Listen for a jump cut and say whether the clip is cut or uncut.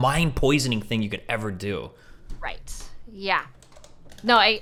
uncut